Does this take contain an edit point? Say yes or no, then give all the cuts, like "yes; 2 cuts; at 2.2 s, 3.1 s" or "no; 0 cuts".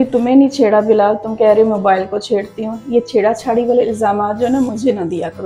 no; 0 cuts